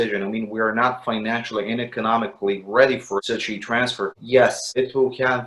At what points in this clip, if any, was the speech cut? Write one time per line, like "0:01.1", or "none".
none